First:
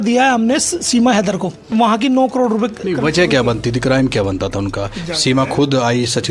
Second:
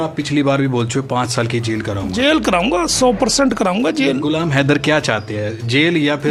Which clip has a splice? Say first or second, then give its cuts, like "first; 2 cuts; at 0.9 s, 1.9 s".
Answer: first; 1 cut; at 1.7 s